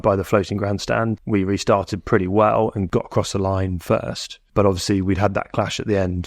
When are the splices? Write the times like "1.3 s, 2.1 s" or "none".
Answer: 1.1 s, 2.9 s, 4.3 s